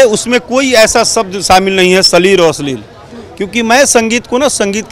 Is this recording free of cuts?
yes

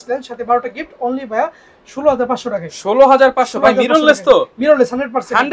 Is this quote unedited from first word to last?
yes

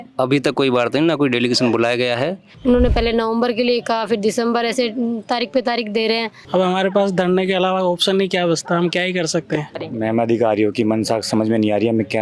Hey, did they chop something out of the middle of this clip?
yes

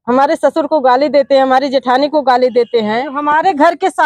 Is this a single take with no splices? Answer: no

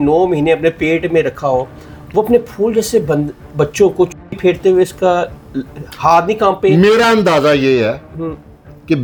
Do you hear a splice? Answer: no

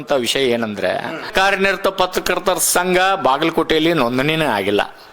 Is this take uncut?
no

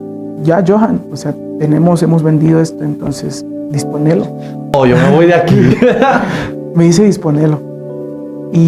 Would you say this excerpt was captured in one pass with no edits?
no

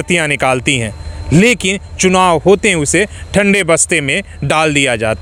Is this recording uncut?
yes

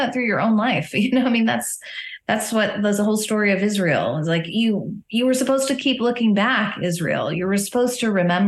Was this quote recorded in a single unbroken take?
yes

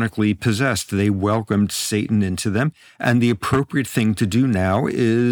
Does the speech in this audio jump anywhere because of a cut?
no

